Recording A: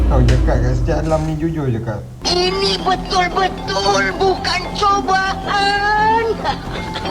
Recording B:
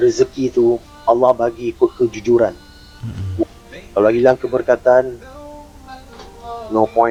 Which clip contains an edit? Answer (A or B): A